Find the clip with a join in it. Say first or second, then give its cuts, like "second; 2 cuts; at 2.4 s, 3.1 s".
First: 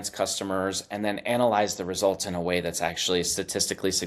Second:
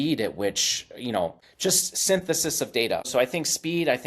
second; 2 cuts; at 1.5 s, 3.1 s